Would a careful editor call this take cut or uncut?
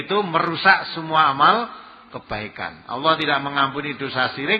uncut